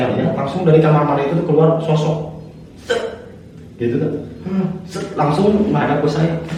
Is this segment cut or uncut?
uncut